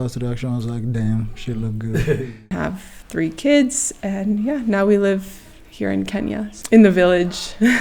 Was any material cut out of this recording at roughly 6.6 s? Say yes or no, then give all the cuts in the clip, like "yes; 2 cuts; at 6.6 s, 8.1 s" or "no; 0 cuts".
yes; 2 cuts; at 2.4 s, 6.6 s